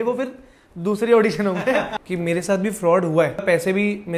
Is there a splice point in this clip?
yes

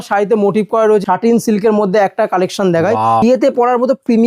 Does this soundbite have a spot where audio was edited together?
yes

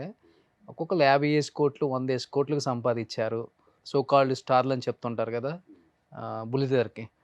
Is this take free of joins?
no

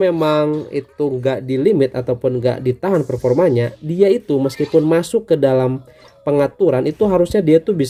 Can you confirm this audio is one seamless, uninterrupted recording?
yes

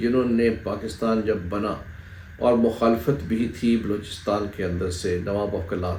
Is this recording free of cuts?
yes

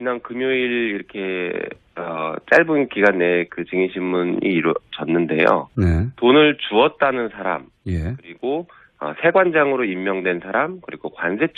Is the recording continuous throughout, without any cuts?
no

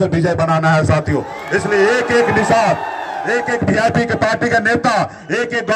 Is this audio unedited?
yes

